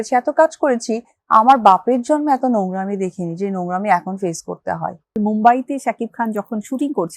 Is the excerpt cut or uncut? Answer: cut